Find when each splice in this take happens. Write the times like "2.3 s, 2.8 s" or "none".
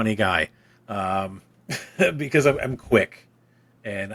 none